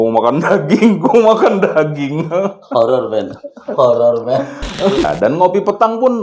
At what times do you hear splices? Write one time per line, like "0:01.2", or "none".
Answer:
0:05.1